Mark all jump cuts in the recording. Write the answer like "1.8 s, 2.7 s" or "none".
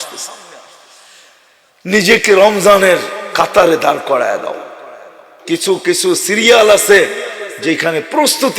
5.4 s